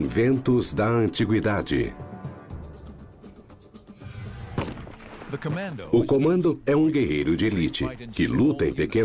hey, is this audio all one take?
no; 1 cut; at 6.2 s

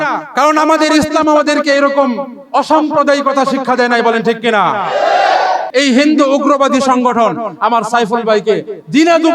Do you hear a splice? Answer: yes; 1 cut; at 5.7 s

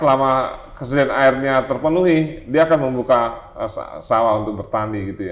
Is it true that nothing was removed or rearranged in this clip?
yes; 0 cuts

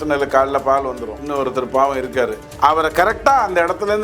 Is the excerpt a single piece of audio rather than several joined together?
no; 2 cuts; at 1.2 s, 2.4 s

